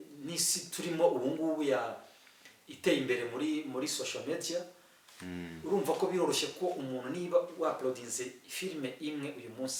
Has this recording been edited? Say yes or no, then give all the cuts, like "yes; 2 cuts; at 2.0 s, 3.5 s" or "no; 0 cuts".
no; 0 cuts